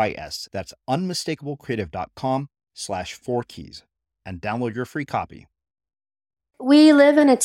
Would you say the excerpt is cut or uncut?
cut